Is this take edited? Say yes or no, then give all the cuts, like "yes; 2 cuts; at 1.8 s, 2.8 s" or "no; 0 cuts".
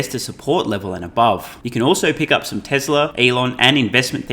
yes; 2 cuts; at 1.6 s, 3.1 s